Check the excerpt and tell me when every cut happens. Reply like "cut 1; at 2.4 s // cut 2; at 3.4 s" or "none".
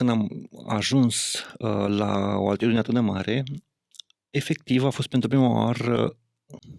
none